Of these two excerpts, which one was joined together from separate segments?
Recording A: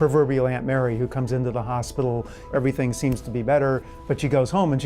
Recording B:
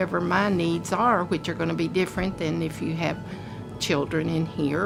A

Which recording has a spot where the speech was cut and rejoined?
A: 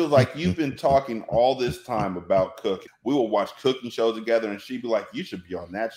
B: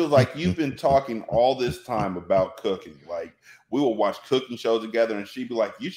A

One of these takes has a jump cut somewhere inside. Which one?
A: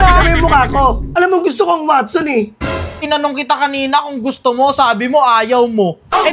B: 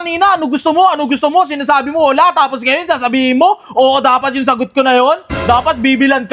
A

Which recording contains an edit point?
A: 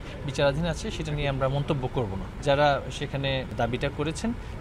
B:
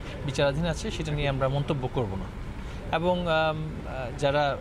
A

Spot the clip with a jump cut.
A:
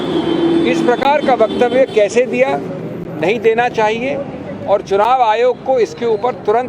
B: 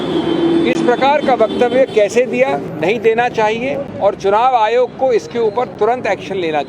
B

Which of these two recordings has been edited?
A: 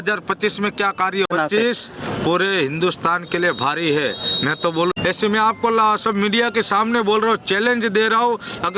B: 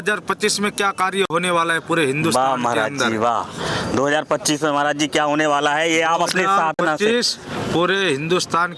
A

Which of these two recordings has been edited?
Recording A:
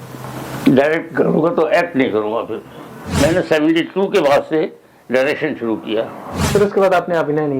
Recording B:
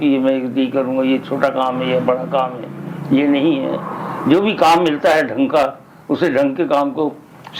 A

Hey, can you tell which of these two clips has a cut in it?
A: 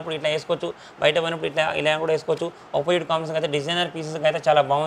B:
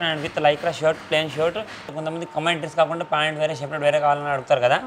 B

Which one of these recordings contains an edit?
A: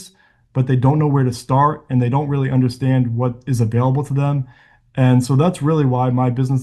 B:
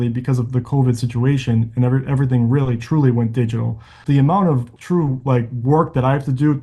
B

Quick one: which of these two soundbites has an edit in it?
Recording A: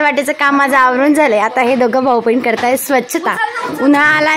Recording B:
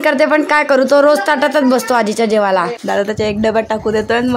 B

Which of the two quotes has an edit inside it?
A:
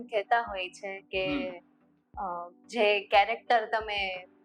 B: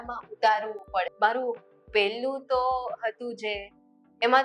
B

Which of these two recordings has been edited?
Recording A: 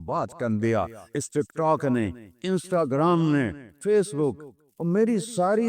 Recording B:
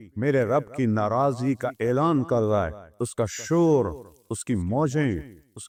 A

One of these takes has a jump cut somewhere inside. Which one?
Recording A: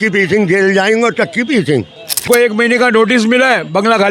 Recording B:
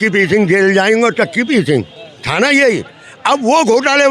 A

